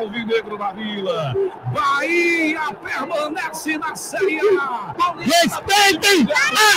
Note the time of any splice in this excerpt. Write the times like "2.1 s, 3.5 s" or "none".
4.9 s